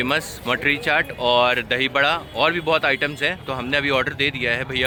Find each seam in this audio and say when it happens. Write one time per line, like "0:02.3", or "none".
none

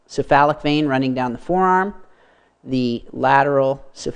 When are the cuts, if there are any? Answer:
0:01.7

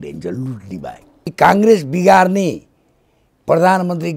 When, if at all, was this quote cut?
0:01.3

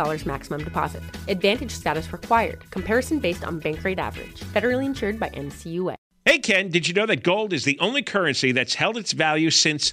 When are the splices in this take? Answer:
0:06.1

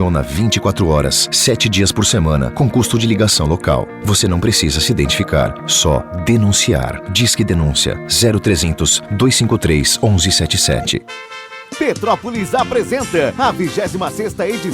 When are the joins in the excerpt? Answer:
0:11.2

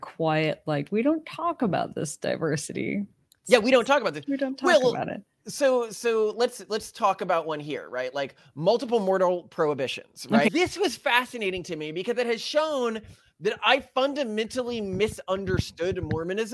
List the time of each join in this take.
0:10.5

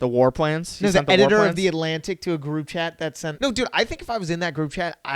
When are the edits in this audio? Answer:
0:03.3

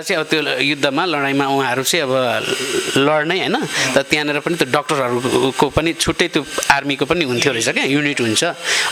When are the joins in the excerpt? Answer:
none

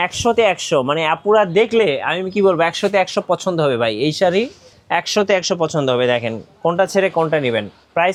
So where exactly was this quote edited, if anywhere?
none

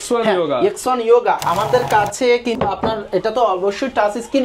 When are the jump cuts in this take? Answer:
0:02.6

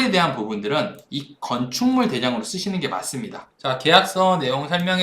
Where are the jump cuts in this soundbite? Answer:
0:03.4

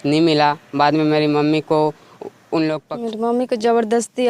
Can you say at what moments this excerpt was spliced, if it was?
0:02.8

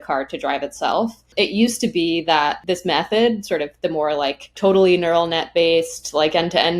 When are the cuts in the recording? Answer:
0:01.3
0:02.6
0:04.5

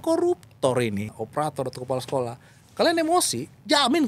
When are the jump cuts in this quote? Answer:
0:01.1

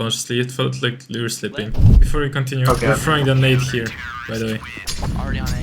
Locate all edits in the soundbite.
0:02.0

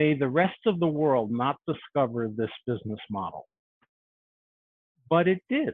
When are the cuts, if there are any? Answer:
none

